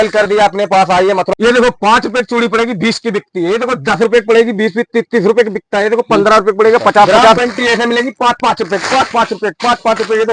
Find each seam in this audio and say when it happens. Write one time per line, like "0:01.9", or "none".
0:01.3
0:07.4